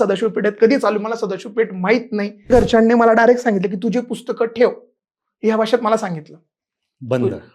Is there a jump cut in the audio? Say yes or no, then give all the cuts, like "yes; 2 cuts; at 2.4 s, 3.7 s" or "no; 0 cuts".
yes; 1 cut; at 2.5 s